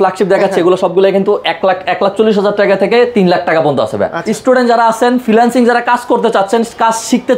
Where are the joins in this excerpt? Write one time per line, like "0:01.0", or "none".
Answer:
0:04.2